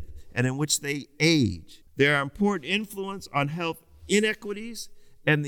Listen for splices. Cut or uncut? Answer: cut